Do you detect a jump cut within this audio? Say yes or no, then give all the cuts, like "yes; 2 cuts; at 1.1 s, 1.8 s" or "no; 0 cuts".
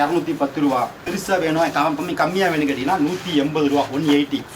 yes; 1 cut; at 1.0 s